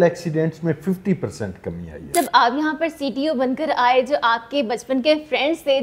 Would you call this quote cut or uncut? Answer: cut